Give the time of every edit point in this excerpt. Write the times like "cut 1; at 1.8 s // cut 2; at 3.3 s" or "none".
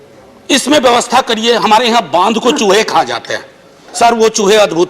cut 1; at 3.8 s